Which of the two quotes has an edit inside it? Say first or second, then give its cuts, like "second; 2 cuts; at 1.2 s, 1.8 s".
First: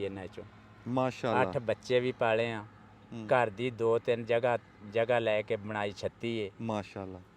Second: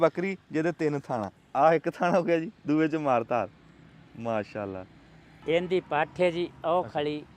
second; 2 cuts; at 1.4 s, 5.3 s